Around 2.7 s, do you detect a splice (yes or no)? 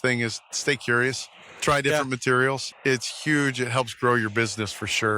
yes